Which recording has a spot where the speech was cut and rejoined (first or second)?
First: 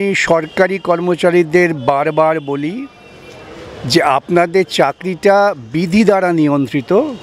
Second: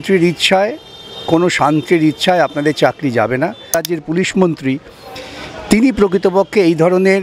second